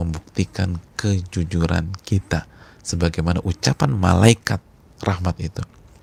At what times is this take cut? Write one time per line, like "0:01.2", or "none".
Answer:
none